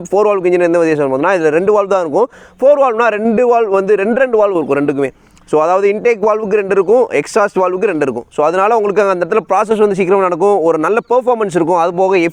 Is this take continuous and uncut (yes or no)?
yes